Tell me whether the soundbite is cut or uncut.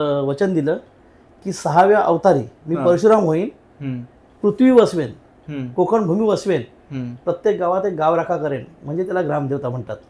uncut